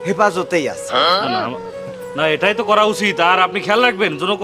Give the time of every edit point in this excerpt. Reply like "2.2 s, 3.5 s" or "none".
2.1 s